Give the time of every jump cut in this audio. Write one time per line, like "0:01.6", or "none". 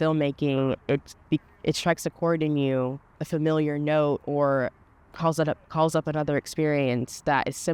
none